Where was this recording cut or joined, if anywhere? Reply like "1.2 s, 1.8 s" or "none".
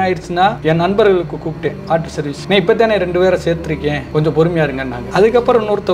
none